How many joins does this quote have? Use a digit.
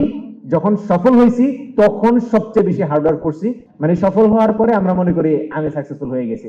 1